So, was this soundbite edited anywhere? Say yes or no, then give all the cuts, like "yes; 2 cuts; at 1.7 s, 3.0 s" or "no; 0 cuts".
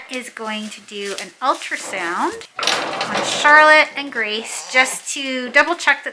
yes; 1 cut; at 2.5 s